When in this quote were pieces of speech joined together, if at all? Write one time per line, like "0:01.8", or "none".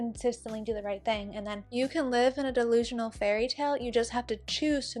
0:01.6